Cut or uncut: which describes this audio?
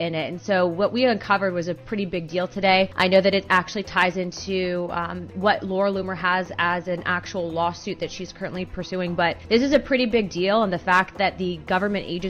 cut